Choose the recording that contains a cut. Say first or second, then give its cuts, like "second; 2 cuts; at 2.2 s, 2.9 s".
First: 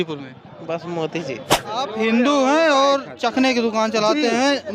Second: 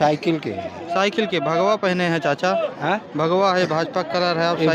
first; 1 cut; at 1.8 s